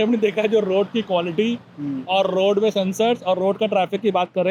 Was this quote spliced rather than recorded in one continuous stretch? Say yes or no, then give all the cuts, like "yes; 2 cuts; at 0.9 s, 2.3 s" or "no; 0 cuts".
no; 0 cuts